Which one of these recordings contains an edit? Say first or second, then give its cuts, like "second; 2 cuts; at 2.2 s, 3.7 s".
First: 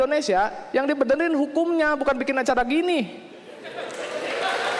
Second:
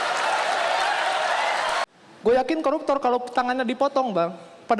second; 1 cut; at 1.8 s